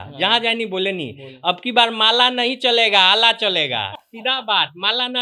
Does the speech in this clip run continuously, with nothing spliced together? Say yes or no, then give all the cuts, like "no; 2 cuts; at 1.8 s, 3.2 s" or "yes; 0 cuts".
yes; 0 cuts